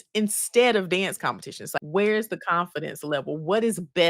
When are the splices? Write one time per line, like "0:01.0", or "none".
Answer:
0:01.6